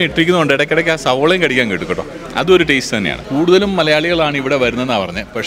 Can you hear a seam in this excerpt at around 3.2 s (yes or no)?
yes